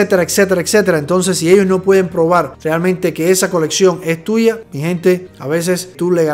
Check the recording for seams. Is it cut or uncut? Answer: uncut